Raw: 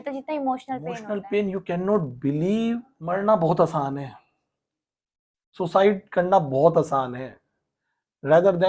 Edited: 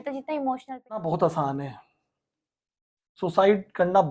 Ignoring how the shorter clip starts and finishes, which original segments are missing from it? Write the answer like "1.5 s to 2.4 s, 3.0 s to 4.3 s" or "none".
1.0 s to 3.4 s